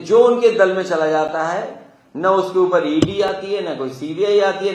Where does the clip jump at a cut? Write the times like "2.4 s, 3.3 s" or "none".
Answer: none